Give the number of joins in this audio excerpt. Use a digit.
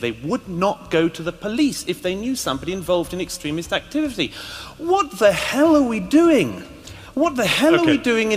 0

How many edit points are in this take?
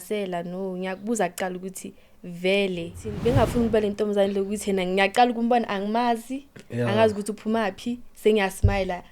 1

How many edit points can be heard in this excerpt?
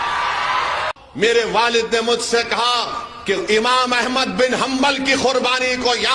1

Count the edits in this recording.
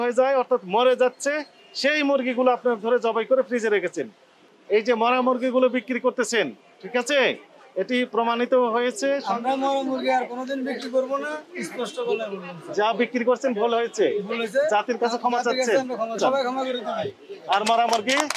3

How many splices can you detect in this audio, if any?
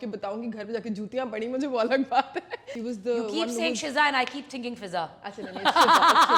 1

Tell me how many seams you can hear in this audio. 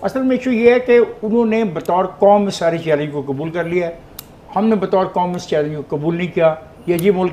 0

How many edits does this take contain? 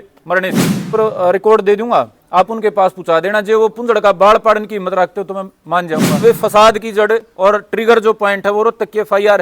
2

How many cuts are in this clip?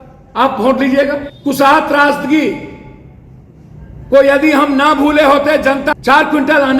2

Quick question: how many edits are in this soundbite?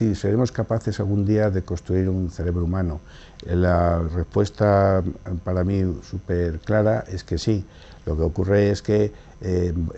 1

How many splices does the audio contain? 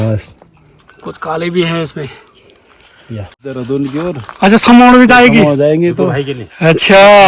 1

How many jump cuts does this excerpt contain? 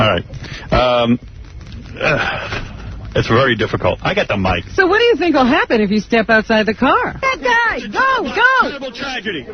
1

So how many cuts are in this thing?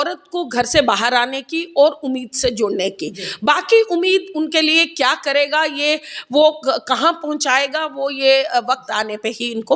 0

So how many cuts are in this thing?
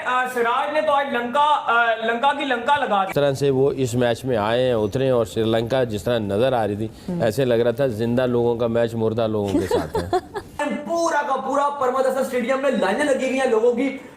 2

